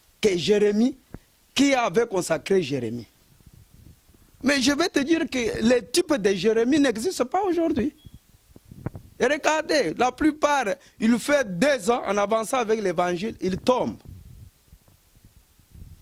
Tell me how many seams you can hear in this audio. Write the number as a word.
zero